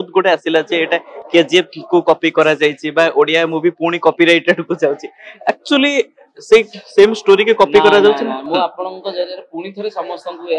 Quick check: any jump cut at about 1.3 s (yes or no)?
no